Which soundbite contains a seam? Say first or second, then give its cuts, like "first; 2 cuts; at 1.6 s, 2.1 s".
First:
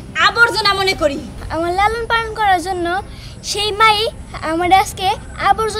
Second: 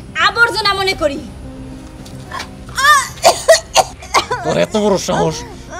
first; 1 cut; at 1.3 s